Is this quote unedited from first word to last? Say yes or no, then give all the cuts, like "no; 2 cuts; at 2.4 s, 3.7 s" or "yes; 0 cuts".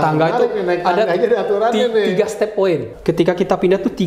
no; 1 cut; at 2.9 s